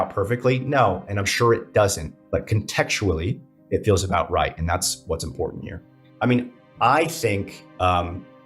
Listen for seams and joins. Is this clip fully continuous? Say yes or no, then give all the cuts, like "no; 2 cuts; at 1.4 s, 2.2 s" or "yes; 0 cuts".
no; 1 cut; at 6.0 s